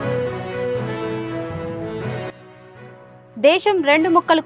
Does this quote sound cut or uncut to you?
cut